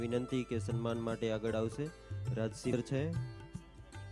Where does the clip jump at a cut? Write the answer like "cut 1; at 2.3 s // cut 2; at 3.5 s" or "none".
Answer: cut 1; at 2.7 s